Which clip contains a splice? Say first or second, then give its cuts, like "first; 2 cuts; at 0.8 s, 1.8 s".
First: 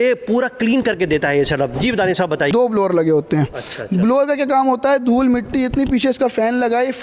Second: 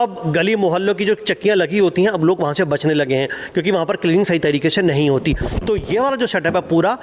first; 1 cut; at 2.5 s